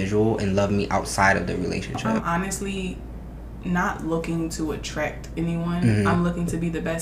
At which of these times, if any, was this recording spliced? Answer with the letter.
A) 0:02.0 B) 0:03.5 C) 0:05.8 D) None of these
A